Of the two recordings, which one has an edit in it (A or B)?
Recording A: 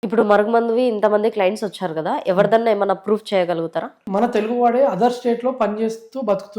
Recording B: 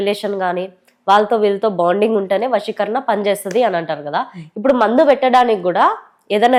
A